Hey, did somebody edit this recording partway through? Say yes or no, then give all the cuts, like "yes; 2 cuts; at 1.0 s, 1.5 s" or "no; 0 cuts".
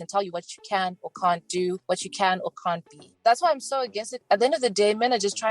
yes; 1 cut; at 4.2 s